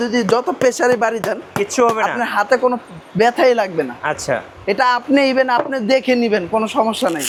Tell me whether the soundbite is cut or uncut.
uncut